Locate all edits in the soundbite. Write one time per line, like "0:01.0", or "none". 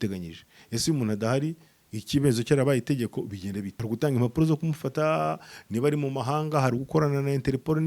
0:03.7